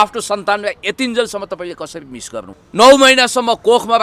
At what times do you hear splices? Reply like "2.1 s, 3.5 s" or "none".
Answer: 2.6 s